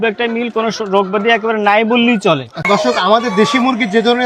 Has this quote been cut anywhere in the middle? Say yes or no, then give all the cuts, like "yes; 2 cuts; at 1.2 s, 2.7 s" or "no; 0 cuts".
yes; 1 cut; at 2.6 s